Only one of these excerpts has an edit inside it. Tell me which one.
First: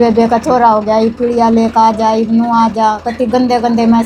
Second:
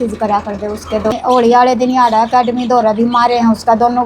second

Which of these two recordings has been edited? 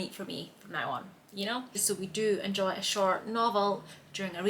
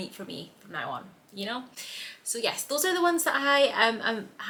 first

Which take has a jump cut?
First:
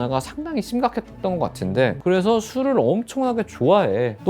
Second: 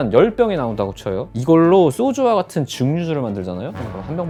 first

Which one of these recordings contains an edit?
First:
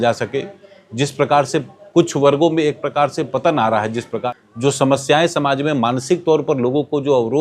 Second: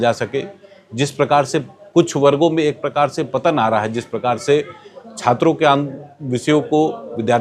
first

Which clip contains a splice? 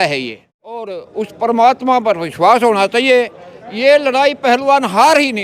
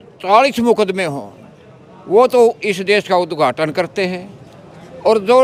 first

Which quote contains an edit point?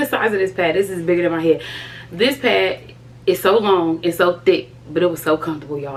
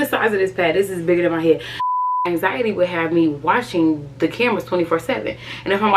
second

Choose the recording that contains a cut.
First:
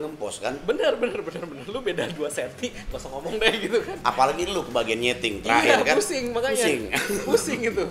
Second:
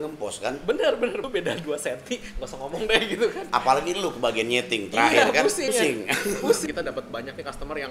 second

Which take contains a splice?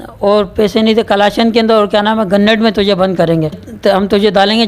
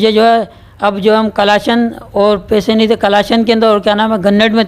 first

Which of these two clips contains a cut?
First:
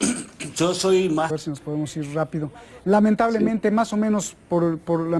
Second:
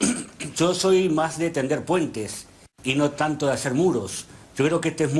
second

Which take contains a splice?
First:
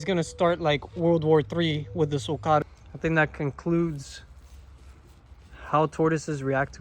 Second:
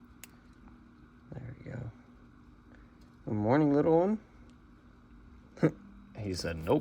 first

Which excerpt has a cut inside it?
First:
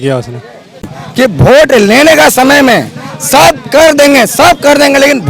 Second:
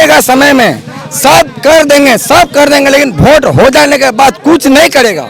first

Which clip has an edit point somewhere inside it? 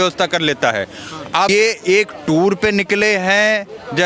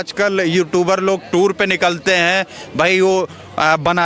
first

